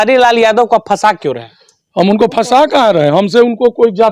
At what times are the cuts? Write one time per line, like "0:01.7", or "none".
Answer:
none